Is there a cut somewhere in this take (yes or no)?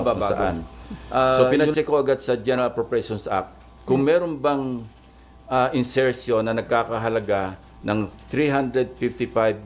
yes